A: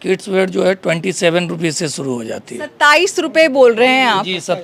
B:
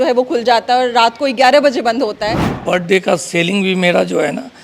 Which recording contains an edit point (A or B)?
B